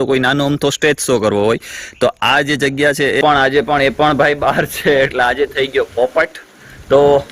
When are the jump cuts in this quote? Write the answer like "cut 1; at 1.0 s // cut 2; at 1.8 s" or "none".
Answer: cut 1; at 3.2 s